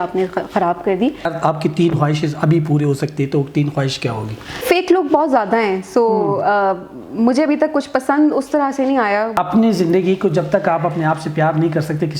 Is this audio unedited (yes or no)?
no